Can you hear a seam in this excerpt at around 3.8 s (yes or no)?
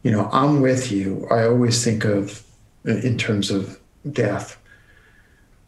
yes